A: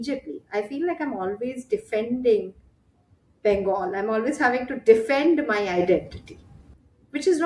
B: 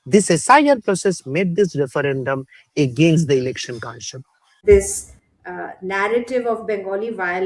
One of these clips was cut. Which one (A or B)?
B